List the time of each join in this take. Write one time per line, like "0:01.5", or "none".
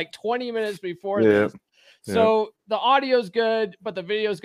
none